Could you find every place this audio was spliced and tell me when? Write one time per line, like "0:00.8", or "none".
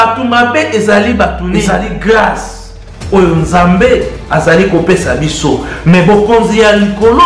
0:01.6